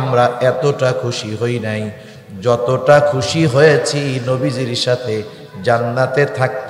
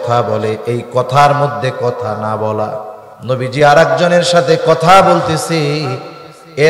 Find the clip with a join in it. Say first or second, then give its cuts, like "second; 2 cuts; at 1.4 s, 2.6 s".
second; 1 cut; at 2.9 s